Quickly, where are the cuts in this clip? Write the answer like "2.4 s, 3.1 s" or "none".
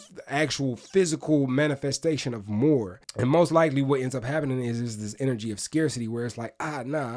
3.0 s